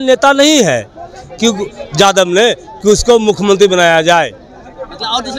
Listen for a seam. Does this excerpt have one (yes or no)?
no